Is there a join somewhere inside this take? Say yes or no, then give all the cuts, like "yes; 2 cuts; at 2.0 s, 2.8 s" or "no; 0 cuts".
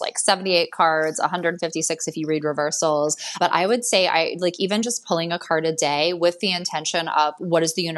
no; 0 cuts